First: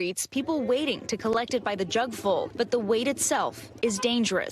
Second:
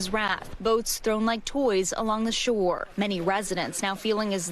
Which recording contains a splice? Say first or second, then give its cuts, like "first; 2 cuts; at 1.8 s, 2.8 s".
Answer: second; 1 cut; at 1.4 s